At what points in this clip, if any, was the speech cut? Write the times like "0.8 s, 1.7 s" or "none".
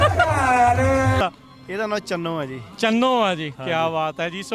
1.2 s